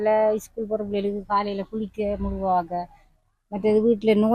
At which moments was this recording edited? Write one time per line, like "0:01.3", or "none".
none